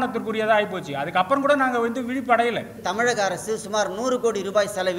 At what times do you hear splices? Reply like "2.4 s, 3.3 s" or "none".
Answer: 2.8 s